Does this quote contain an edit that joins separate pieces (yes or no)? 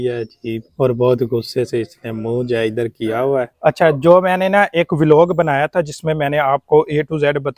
yes